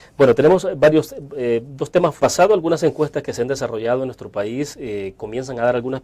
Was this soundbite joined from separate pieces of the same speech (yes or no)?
no